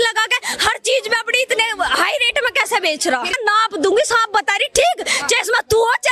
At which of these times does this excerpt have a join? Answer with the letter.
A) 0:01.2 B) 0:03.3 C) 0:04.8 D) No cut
B